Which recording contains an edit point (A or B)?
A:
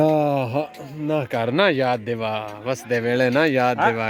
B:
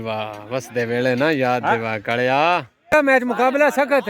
B